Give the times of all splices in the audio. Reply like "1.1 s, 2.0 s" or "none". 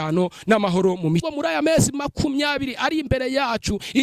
1.2 s